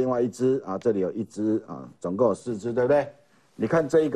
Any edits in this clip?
no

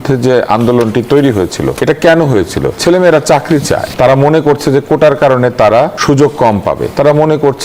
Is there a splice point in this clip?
yes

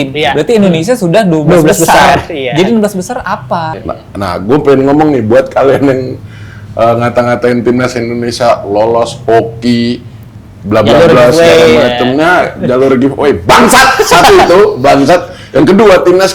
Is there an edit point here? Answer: yes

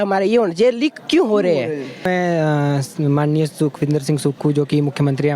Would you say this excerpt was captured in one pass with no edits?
no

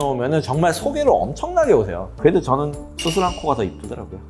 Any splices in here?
no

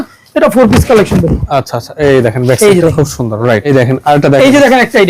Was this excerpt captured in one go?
no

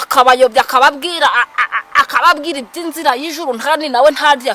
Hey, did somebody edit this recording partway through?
no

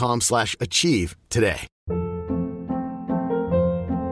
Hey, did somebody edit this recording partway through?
yes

